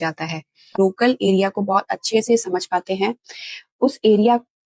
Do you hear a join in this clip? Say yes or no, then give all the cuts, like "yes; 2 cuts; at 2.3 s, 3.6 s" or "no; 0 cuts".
no; 0 cuts